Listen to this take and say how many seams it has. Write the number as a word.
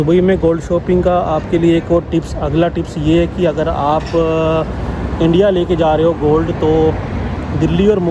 zero